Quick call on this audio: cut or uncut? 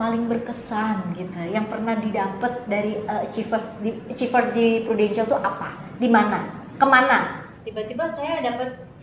cut